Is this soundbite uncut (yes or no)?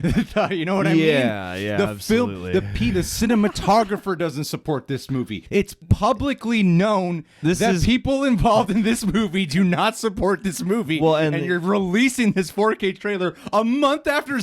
yes